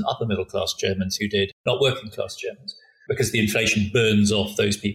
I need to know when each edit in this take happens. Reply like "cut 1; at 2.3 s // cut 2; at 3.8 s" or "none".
cut 1; at 1.6 s // cut 2; at 2.9 s